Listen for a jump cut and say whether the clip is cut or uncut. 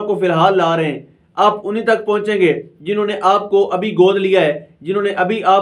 uncut